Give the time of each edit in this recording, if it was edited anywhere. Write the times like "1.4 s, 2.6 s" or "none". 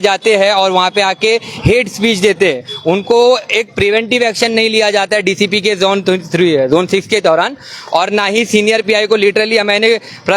none

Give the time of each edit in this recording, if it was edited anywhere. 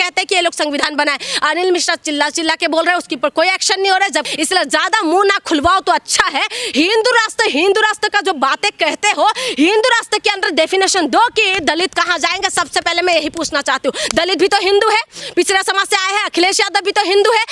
4.3 s

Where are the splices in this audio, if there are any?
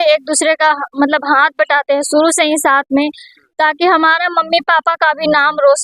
none

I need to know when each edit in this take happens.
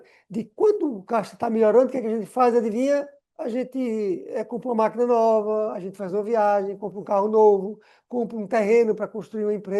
3.2 s

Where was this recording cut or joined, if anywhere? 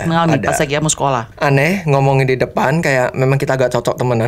1.3 s

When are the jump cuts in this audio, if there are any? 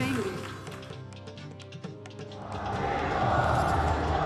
0.9 s, 2.5 s

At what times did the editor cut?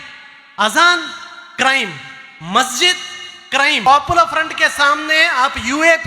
3.8 s

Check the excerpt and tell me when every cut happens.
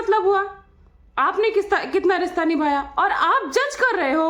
none

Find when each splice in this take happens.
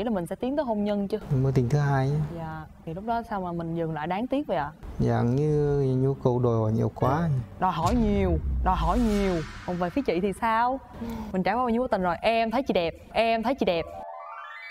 4.8 s, 9.5 s

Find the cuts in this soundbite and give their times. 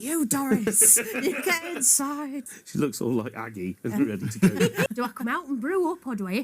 2.4 s, 4.9 s

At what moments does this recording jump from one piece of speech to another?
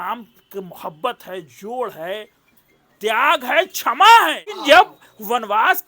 4.6 s

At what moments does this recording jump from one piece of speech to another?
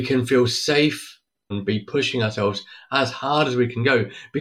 1.6 s

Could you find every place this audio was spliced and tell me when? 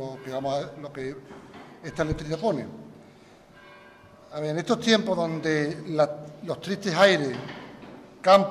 3.8 s

